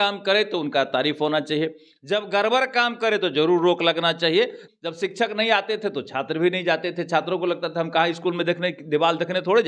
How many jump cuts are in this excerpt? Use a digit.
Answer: 1